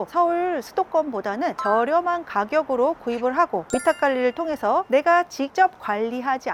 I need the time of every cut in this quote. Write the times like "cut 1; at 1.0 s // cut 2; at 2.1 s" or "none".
none